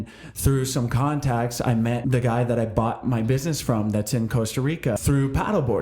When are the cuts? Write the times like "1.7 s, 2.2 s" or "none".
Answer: 2.0 s, 5.0 s